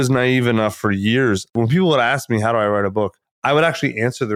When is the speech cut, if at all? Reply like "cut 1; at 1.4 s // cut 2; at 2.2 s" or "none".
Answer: cut 1; at 1.5 s // cut 2; at 3.3 s